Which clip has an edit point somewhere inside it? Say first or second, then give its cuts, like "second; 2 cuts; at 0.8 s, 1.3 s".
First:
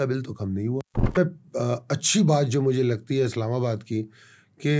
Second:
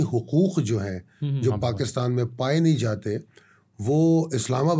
first; 1 cut; at 1.2 s